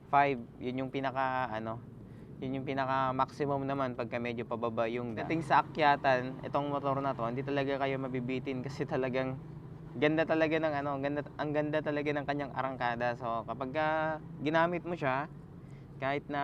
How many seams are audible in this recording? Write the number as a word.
one